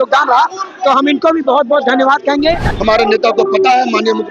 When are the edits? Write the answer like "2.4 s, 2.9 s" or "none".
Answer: 2.7 s